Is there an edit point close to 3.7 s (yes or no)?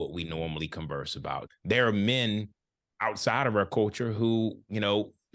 no